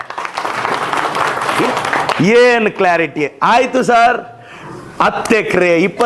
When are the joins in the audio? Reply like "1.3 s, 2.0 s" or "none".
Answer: 1.7 s